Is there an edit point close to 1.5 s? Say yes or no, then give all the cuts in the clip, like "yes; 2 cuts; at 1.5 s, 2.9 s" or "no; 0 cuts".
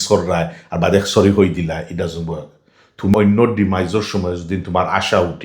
no; 1 cut; at 3.1 s